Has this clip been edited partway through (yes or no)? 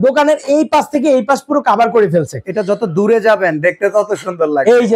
no